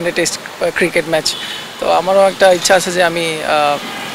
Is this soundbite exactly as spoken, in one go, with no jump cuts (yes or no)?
yes